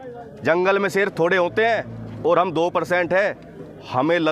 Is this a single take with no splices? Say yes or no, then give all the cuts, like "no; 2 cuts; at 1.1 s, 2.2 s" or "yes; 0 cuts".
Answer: yes; 0 cuts